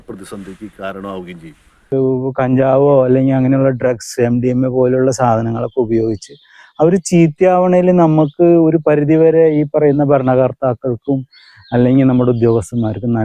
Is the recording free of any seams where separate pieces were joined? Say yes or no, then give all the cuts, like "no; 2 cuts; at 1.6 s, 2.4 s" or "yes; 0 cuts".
no; 1 cut; at 1.9 s